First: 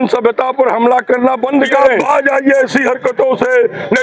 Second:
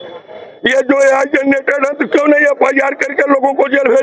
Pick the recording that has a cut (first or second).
first